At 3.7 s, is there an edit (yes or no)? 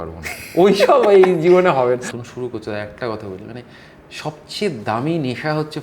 no